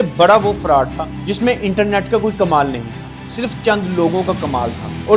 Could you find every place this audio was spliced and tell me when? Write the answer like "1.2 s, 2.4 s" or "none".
none